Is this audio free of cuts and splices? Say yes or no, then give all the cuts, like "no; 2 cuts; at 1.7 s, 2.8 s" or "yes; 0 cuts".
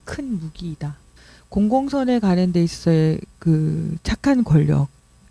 no; 1 cut; at 1.1 s